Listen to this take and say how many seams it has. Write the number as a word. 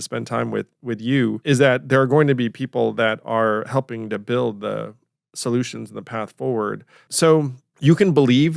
three